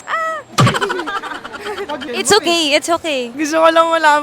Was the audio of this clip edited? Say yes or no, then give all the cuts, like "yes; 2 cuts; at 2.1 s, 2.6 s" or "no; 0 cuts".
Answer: yes; 1 cut; at 3.3 s